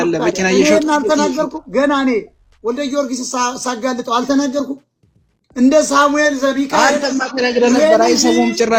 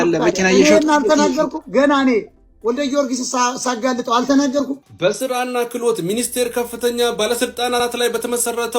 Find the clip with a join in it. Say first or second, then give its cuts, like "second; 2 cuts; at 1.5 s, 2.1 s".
second; 1 cut; at 4.9 s